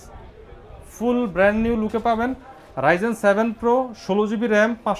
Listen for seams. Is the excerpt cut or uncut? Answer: uncut